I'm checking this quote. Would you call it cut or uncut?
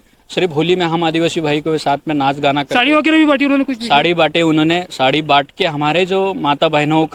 uncut